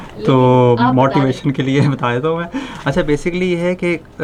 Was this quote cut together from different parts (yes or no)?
no